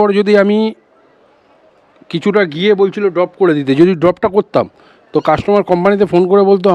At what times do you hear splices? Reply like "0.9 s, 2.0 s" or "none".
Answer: none